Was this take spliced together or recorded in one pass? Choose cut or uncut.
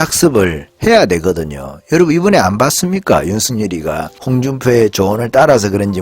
cut